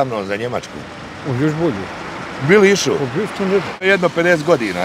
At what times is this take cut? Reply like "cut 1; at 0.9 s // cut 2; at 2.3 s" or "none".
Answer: cut 1; at 3.9 s